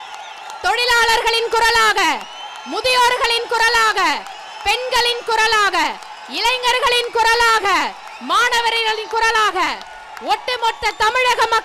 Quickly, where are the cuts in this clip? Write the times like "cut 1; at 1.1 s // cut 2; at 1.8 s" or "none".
none